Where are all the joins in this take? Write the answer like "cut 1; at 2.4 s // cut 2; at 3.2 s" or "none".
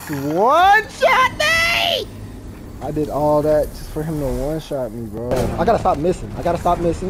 cut 1; at 5.4 s